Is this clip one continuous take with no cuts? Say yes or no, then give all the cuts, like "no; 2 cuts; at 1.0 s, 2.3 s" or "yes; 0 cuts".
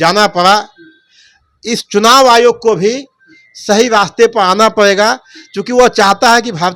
yes; 0 cuts